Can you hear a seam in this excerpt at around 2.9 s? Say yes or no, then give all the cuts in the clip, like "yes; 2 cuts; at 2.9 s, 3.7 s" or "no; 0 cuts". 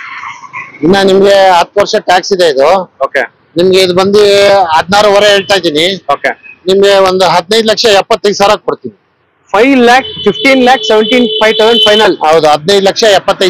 no; 0 cuts